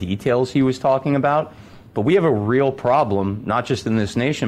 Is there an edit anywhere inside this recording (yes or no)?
no